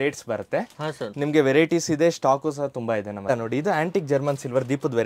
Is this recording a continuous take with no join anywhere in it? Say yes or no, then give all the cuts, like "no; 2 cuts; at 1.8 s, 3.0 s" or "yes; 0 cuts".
no; 1 cut; at 3.2 s